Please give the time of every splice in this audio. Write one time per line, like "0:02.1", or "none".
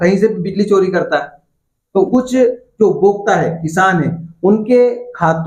0:02.1